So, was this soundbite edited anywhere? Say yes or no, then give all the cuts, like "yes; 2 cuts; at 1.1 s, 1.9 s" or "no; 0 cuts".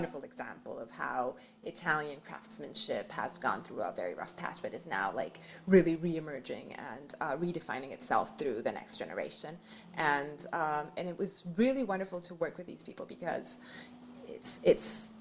no; 0 cuts